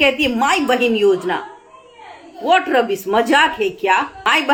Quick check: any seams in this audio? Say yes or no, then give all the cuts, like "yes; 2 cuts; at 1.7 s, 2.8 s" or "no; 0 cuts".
no; 0 cuts